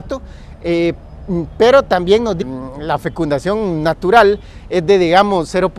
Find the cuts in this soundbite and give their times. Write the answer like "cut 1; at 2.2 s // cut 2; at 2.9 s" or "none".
none